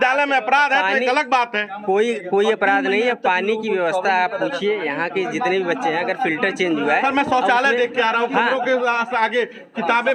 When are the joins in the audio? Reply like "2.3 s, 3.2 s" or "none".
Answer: none